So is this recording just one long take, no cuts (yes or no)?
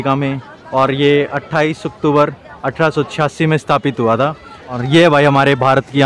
no